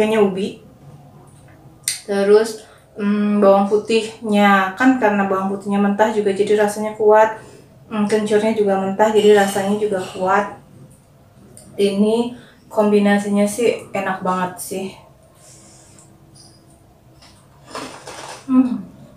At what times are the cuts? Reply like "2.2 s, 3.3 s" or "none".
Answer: none